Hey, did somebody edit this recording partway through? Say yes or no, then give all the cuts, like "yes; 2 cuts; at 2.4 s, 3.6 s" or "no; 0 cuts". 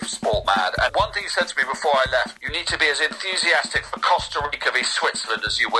yes; 2 cuts; at 0.9 s, 2.4 s